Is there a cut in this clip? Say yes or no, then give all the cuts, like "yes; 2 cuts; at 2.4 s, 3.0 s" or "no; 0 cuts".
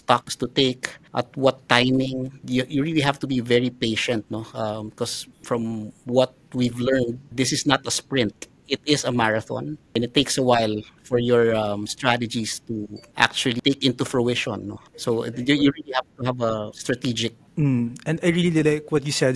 no; 0 cuts